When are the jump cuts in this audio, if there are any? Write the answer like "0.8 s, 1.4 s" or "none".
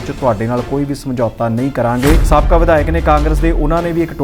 2.2 s